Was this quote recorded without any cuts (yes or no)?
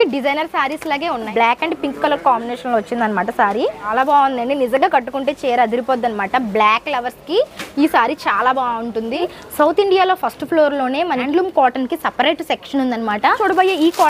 no